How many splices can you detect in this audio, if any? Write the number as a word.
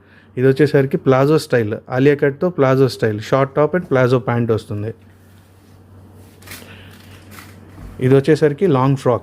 zero